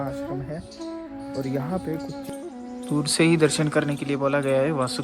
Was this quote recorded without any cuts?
no; 1 cut; at 2.1 s

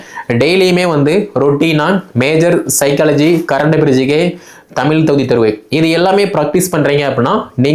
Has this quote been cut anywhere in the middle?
no; 0 cuts

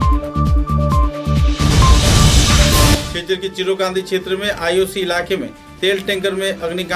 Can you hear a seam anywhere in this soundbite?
yes; 1 cut; at 3.0 s

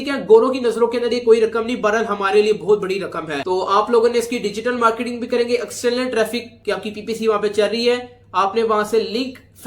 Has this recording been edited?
no; 0 cuts

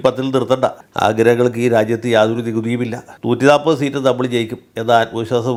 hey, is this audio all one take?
yes; 0 cuts

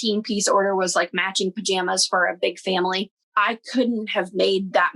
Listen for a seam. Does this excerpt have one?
yes; 1 cut; at 3.2 s

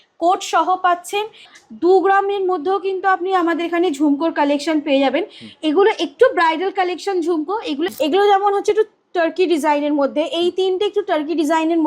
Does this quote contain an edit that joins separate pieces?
yes; 2 cuts; at 1.5 s, 7.9 s

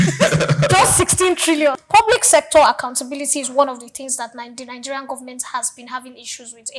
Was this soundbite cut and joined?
yes; 1 cut; at 1.8 s

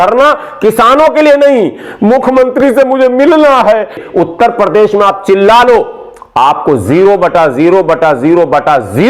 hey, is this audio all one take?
no; 1 cut; at 4.0 s

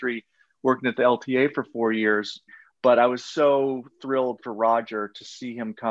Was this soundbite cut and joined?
yes; 1 cut; at 2.4 s

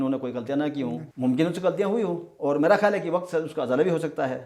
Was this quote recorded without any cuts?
no; 1 cut; at 1.1 s

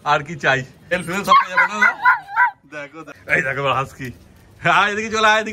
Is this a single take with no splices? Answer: no; 2 cuts; at 0.9 s, 3.1 s

